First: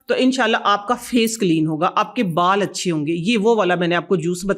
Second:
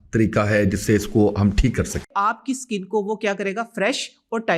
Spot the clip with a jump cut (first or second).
second